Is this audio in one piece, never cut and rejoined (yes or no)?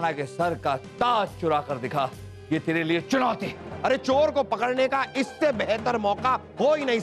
no